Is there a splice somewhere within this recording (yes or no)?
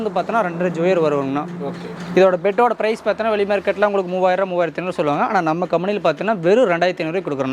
no